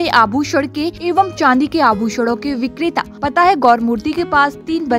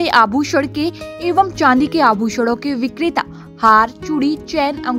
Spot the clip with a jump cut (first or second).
first